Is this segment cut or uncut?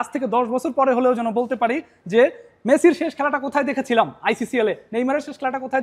uncut